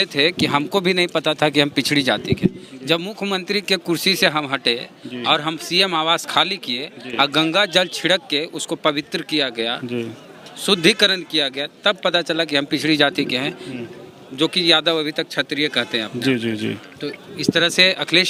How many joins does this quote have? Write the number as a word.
zero